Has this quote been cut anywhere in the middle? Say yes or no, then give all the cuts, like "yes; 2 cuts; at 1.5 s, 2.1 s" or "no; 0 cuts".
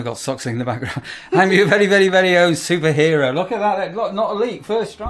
no; 0 cuts